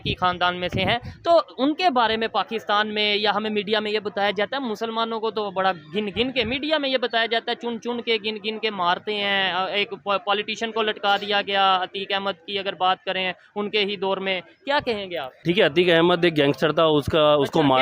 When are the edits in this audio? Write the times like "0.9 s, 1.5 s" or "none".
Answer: 15.4 s